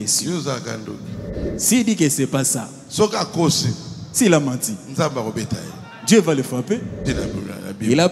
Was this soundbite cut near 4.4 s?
no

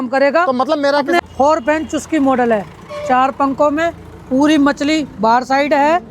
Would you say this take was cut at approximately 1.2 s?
yes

